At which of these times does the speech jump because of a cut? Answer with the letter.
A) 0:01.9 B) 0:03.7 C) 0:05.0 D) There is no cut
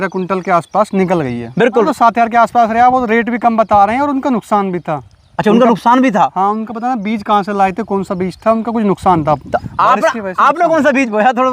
A